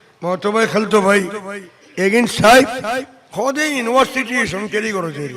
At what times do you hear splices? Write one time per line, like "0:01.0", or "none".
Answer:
none